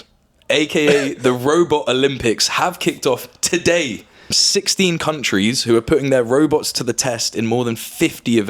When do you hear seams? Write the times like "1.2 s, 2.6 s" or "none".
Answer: 4.4 s